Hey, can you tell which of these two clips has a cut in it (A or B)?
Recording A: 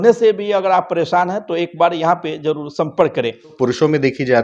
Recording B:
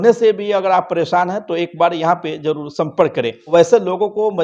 A